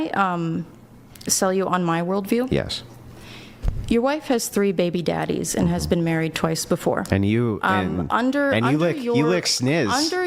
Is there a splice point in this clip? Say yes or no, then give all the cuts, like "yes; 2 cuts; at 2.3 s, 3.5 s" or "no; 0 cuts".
yes; 2 cuts; at 2.7 s, 8.5 s